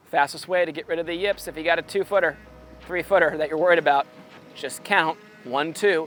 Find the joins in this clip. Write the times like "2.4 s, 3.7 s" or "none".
none

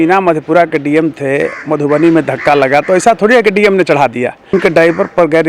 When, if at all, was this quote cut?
4.5 s

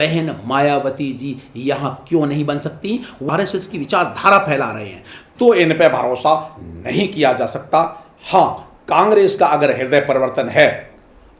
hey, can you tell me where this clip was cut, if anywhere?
3.2 s

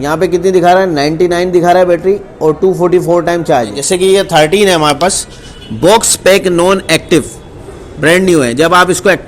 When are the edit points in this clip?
3.8 s

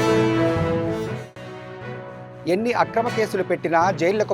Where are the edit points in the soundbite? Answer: 1.2 s

